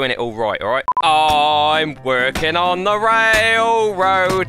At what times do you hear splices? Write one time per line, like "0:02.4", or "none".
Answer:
0:01.0